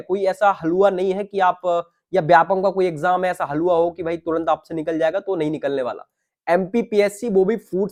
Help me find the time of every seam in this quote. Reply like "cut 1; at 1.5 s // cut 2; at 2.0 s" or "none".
none